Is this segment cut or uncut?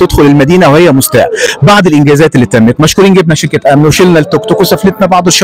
uncut